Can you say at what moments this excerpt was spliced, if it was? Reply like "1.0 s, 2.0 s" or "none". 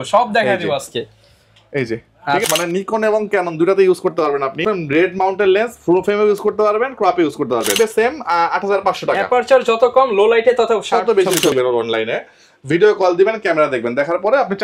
2.5 s, 4.6 s, 7.7 s, 11.5 s